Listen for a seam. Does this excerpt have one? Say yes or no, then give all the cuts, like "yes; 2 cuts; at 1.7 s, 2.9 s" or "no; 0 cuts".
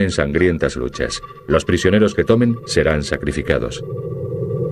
yes; 1 cut; at 3.6 s